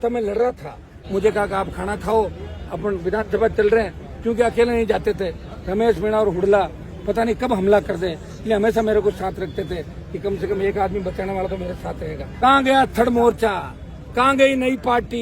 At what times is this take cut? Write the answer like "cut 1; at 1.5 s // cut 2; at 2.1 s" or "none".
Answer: cut 1; at 1.0 s // cut 2; at 12.3 s